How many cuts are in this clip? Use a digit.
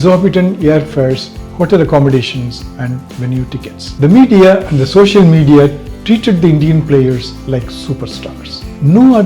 1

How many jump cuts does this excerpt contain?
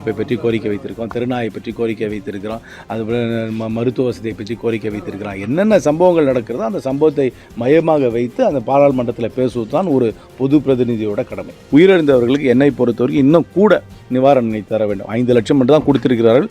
1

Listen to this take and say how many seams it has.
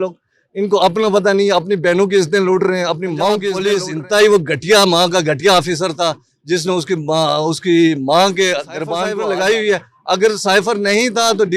2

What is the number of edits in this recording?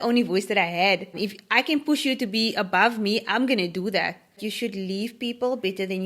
2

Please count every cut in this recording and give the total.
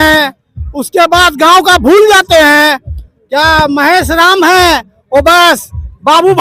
0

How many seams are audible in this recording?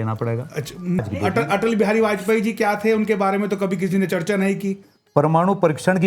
2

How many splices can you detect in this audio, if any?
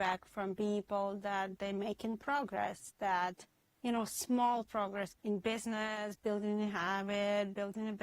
1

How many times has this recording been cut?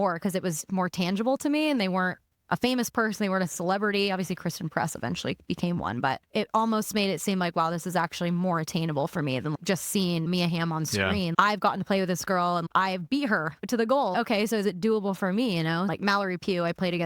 1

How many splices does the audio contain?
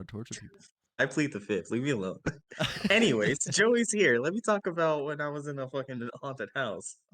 1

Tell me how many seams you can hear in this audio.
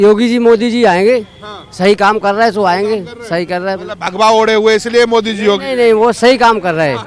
0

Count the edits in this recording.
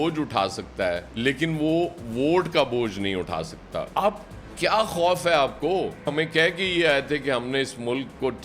2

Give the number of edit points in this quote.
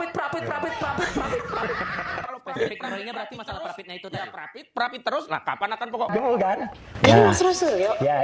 1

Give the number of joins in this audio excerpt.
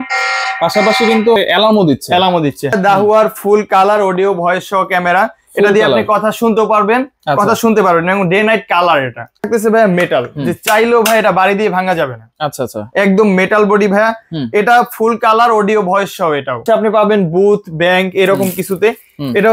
4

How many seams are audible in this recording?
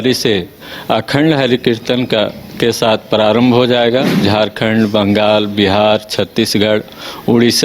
1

